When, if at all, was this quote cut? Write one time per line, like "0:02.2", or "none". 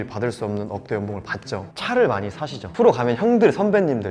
0:01.7
0:02.7